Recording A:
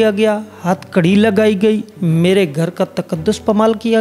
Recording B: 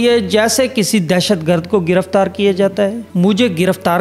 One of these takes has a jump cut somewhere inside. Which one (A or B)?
B